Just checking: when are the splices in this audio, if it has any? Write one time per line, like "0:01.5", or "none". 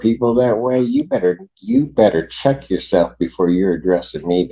none